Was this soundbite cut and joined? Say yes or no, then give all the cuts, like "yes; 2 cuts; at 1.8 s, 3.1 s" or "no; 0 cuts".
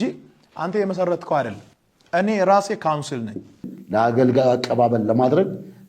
yes; 1 cut; at 3.7 s